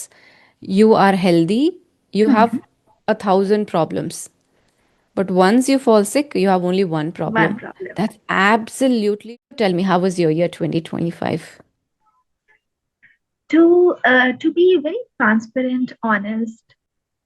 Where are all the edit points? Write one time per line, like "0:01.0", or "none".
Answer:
0:09.2